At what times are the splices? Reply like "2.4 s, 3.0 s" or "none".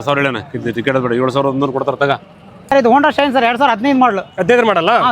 2.7 s